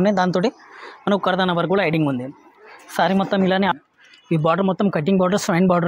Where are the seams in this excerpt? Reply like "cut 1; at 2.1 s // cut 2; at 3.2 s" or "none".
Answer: cut 1; at 3.7 s